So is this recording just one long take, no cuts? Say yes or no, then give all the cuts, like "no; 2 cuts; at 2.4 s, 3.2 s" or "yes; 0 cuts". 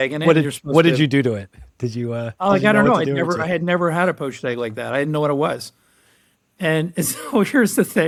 yes; 0 cuts